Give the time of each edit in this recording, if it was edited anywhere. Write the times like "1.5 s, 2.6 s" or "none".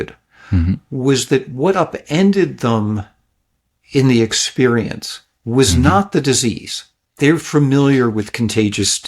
none